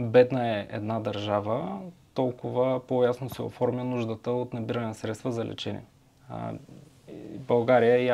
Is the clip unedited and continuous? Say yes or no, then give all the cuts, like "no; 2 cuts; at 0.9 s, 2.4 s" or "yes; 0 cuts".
yes; 0 cuts